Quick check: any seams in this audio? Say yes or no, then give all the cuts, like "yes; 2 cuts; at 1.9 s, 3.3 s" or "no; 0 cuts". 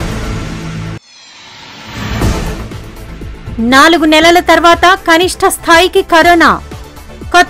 yes; 1 cut; at 0.9 s